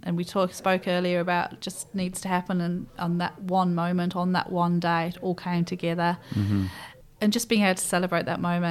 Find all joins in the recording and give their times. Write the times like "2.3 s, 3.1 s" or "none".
6.9 s